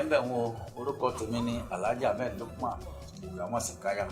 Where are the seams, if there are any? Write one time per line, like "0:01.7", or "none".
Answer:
none